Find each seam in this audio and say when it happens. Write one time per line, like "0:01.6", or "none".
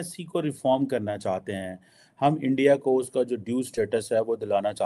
none